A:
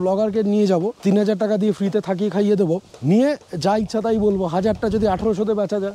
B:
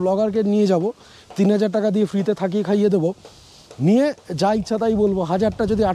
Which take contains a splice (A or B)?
A